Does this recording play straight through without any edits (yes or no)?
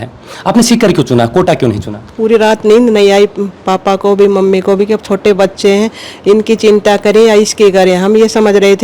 no